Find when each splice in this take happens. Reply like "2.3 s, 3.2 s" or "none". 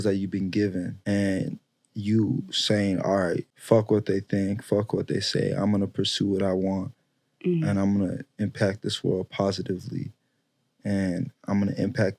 1.0 s, 3.5 s